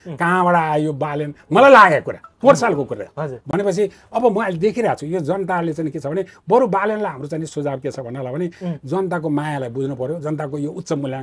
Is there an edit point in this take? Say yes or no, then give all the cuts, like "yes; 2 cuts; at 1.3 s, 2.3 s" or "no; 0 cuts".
no; 0 cuts